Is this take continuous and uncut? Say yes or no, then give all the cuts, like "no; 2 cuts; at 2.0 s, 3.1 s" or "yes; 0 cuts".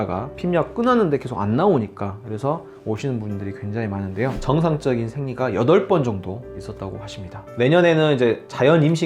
no; 1 cut; at 4.4 s